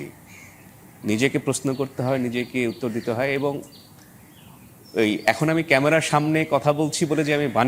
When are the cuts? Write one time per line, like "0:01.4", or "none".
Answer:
none